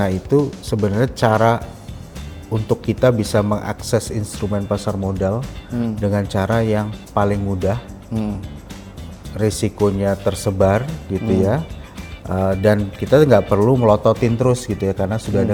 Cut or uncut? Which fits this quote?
uncut